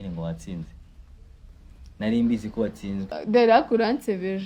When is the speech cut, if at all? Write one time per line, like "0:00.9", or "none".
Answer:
0:03.1